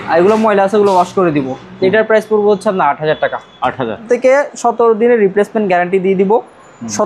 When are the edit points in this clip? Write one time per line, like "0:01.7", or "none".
0:04.0